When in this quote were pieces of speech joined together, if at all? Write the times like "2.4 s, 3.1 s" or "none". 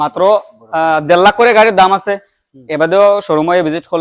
none